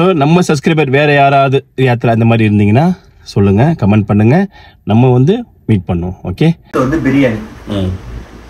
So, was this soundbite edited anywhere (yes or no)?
yes